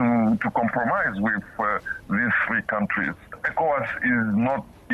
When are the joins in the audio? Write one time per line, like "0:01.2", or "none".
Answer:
0:03.4